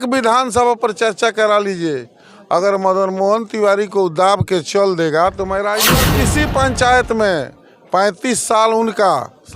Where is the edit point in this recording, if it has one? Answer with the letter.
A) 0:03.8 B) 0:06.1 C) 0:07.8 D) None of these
B